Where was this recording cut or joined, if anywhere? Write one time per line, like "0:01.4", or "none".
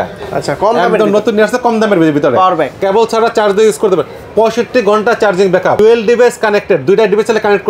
0:02.8
0:05.8